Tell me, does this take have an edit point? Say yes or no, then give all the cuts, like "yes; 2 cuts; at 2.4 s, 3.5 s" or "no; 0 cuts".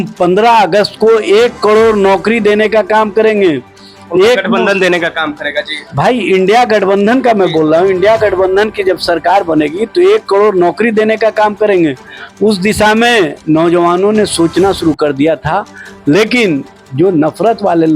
no; 0 cuts